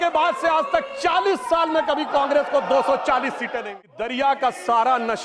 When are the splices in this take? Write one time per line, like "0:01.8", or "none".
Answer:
0:04.0